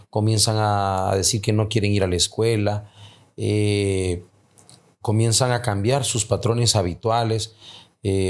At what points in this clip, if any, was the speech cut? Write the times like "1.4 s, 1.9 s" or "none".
none